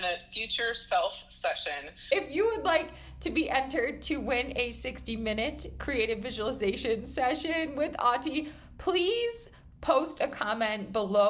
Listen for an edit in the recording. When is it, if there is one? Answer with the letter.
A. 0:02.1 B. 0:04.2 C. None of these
A